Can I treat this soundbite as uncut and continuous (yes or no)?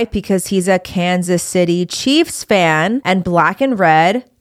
yes